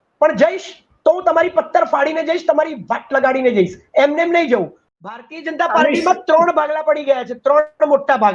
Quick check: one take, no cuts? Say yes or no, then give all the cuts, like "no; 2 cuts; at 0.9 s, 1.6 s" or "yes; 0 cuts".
no; 1 cut; at 4.8 s